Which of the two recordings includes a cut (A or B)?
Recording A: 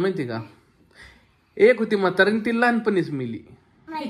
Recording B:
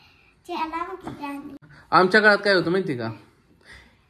B